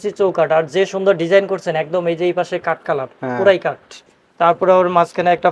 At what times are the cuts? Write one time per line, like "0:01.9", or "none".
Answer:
none